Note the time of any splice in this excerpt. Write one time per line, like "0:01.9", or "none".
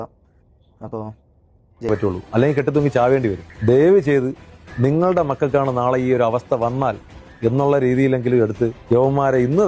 0:01.9